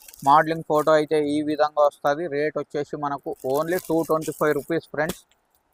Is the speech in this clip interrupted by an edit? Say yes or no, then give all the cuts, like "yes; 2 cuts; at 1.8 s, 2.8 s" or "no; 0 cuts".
no; 0 cuts